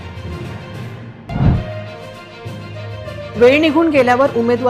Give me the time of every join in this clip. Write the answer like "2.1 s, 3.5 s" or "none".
1.2 s